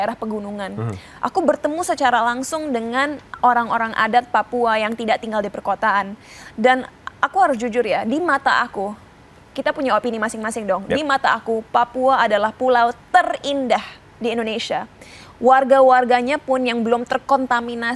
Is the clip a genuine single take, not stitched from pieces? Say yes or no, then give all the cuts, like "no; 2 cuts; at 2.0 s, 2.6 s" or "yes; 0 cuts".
yes; 0 cuts